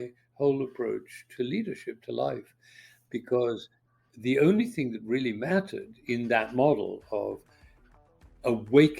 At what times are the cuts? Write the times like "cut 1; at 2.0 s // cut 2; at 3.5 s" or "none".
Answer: cut 1; at 1.2 s